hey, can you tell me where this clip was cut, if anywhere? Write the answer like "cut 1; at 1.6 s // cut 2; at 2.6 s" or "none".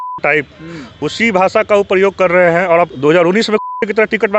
cut 1; at 2.9 s

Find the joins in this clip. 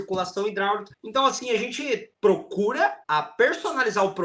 cut 1; at 0.9 s // cut 2; at 2.1 s // cut 3; at 3.0 s

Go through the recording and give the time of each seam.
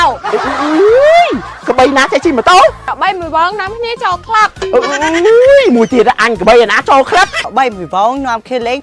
cut 1; at 2.9 s // cut 2; at 7.4 s

